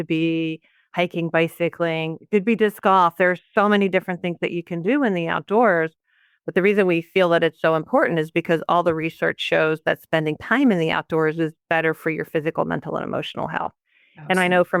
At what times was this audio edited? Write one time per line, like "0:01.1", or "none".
none